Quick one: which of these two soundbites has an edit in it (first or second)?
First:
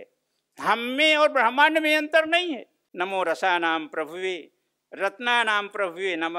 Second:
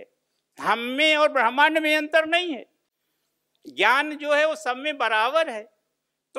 first